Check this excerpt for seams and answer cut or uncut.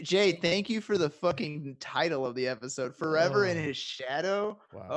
uncut